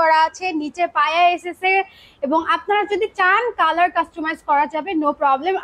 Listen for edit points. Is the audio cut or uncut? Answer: uncut